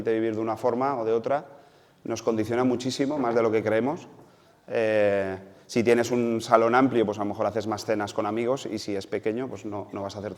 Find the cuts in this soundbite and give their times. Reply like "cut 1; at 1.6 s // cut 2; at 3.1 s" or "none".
none